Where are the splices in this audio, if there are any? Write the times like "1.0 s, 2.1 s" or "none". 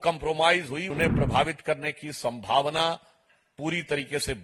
0.9 s